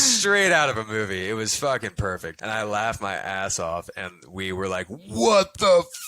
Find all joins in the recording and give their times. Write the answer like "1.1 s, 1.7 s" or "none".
2.3 s